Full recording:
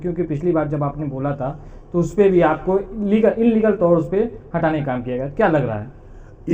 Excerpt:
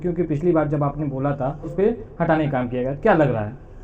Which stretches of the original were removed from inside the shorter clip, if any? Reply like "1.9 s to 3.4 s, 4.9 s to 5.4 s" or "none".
1.7 s to 4.1 s